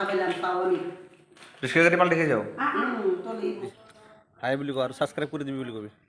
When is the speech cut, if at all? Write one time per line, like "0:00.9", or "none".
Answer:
0:03.8